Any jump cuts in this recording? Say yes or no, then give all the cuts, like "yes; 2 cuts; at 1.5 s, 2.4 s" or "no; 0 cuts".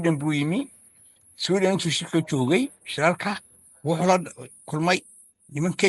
no; 0 cuts